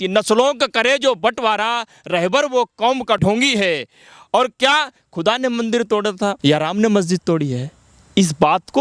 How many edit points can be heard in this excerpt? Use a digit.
2